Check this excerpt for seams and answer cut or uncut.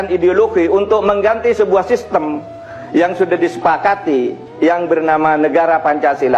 uncut